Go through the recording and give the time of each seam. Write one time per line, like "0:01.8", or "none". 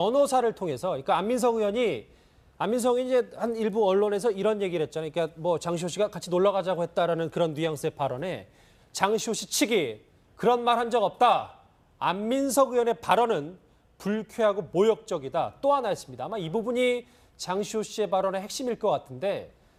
none